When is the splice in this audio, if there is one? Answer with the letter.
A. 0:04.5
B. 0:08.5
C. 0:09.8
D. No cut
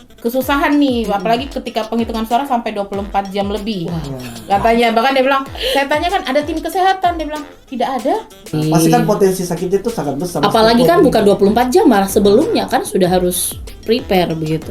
B